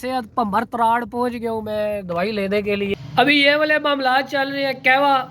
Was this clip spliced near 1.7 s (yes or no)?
no